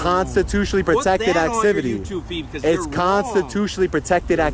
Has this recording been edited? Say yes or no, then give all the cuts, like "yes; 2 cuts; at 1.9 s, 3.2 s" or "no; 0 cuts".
no; 0 cuts